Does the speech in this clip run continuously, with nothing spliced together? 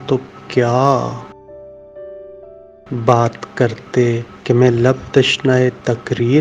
no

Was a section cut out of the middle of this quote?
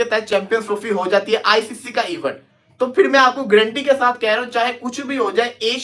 no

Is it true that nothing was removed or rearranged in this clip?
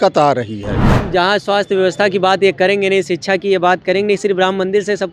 no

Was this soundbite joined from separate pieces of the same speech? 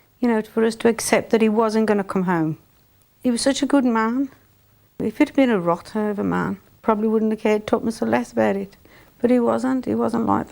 yes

